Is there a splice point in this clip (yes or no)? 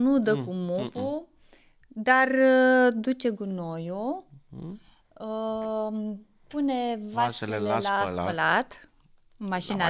no